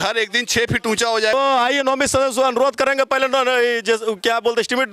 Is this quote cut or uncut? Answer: cut